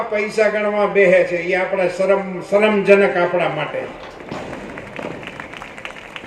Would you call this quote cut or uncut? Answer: uncut